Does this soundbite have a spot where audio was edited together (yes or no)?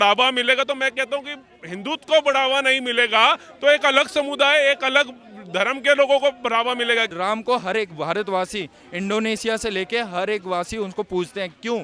yes